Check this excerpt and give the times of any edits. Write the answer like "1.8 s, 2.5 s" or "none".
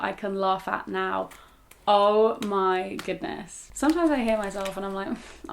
3.6 s